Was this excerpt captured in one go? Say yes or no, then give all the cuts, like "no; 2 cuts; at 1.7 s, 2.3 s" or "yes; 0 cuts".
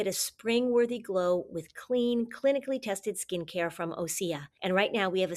yes; 0 cuts